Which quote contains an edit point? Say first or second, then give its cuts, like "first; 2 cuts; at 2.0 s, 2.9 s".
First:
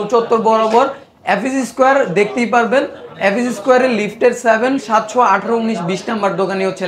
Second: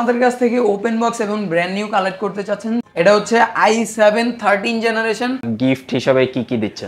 second; 2 cuts; at 2.8 s, 5.5 s